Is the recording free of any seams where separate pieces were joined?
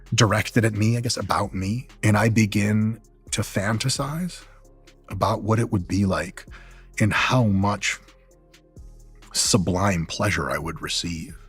no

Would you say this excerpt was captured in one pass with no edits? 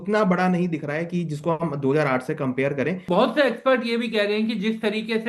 no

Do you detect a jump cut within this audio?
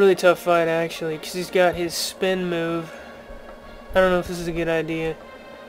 yes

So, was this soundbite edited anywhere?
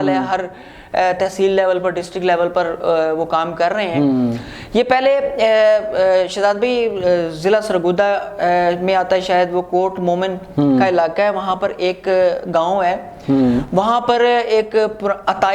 no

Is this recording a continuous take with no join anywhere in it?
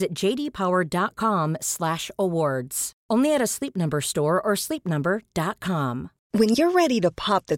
yes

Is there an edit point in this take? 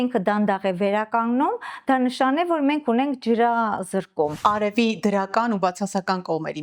yes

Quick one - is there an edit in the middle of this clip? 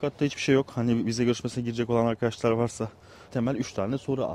yes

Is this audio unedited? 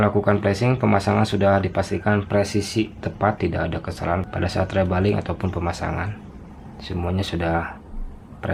yes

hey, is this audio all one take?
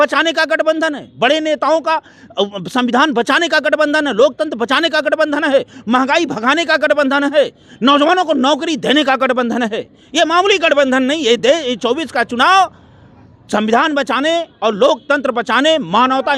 yes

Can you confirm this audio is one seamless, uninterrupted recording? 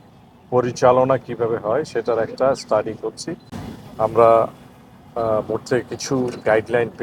yes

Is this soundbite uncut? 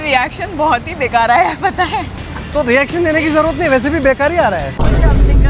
yes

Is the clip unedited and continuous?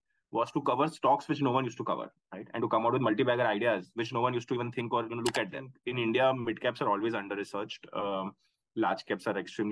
no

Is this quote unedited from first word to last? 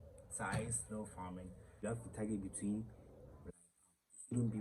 no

